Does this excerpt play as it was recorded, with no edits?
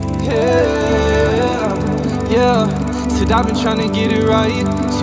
yes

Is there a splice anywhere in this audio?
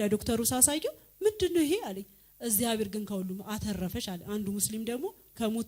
no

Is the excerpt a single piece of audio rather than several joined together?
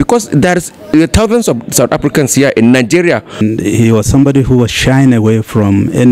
no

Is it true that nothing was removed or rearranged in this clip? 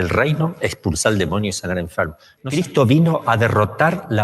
no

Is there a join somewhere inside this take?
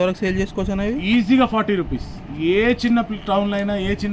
no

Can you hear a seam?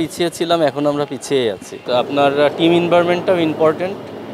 yes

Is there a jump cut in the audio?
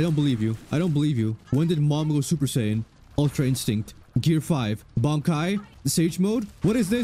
yes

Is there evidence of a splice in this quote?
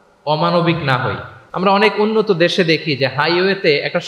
yes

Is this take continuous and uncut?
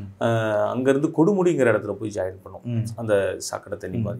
yes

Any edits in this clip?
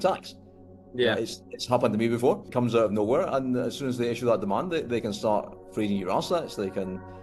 yes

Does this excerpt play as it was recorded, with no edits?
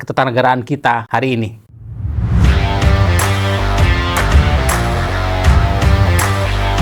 no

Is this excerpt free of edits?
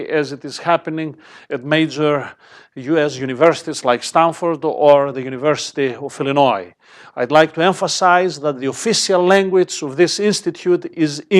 no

